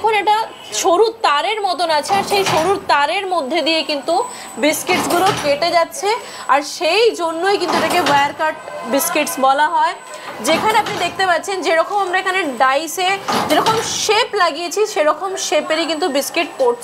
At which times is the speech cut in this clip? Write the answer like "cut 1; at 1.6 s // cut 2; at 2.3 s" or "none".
none